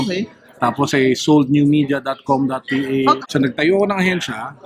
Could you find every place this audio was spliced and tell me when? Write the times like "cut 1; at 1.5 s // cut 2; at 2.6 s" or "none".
cut 1; at 3.2 s